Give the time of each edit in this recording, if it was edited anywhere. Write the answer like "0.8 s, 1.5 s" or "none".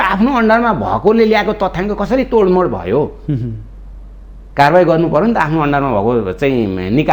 none